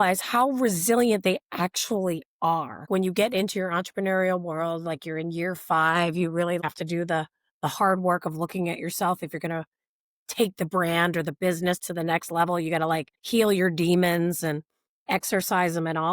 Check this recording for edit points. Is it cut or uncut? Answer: cut